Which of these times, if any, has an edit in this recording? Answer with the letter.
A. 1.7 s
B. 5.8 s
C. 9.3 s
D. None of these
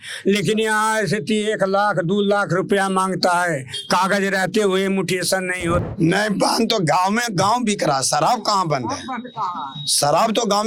B